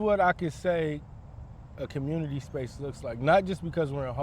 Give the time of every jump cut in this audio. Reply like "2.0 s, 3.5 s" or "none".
none